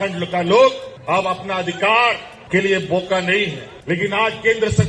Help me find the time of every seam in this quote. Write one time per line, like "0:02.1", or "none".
0:00.9
0:02.3
0:03.7